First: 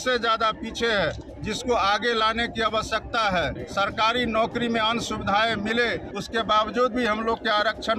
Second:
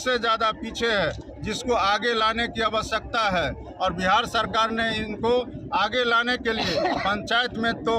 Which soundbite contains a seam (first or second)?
first